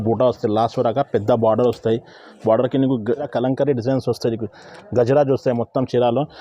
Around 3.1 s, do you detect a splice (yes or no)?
yes